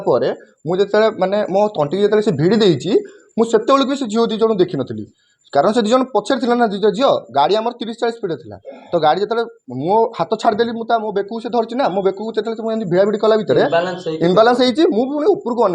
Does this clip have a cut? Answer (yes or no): no